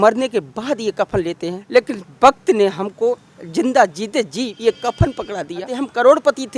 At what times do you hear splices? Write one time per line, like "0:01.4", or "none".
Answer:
0:01.6
0:04.5
0:05.7